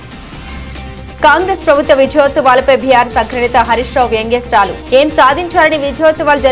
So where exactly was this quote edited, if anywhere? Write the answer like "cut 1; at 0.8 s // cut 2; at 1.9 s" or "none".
cut 1; at 1.2 s